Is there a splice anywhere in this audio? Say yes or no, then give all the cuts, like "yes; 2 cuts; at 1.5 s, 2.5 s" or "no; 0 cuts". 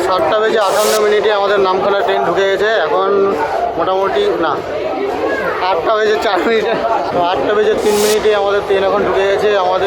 no; 0 cuts